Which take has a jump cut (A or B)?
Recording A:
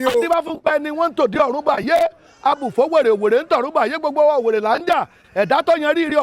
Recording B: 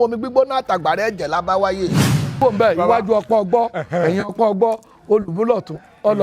B